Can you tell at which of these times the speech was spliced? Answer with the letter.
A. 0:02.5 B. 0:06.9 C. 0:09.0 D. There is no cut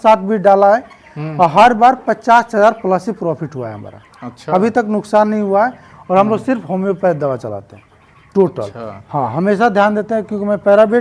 D